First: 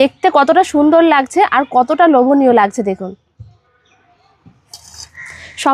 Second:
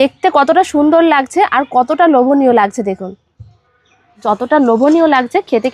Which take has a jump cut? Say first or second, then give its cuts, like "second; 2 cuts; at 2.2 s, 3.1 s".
second; 1 cut; at 4.2 s